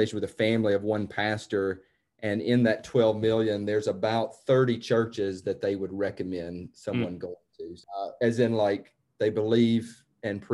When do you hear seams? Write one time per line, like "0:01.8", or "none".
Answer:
0:07.7